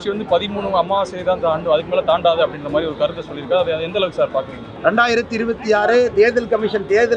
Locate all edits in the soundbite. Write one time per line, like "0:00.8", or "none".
0:04.6